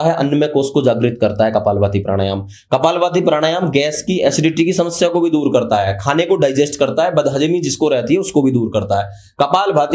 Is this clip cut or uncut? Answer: uncut